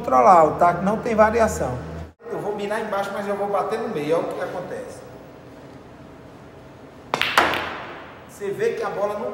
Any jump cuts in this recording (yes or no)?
yes